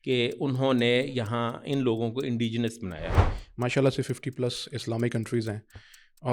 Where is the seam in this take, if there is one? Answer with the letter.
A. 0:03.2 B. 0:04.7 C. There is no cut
A